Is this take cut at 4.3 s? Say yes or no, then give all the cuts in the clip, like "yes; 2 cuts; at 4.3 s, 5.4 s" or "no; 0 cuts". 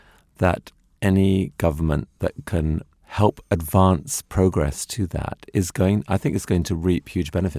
no; 1 cut; at 3.0 s